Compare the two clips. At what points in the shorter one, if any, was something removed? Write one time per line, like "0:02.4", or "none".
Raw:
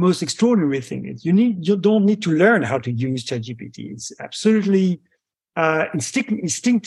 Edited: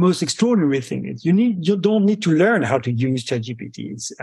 none